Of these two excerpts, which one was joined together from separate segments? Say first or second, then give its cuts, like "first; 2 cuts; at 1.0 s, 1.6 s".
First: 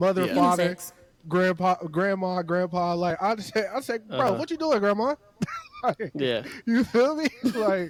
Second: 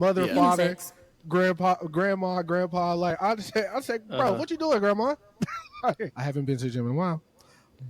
second; 1 cut; at 6.1 s